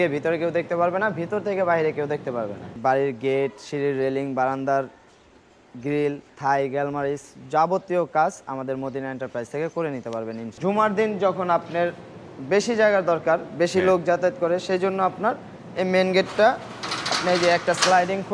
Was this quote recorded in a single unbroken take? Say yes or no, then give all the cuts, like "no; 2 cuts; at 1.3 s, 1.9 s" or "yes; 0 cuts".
no; 3 cuts; at 2.8 s, 6.3 s, 10.5 s